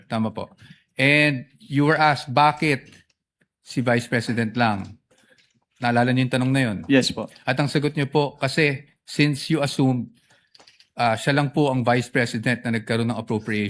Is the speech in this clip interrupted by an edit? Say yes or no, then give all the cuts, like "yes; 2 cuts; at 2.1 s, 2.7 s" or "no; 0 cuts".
no; 0 cuts